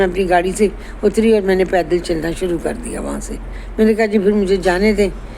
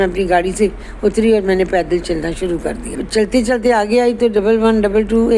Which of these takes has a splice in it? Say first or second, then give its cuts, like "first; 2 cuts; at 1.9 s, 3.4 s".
second; 1 cut; at 2.9 s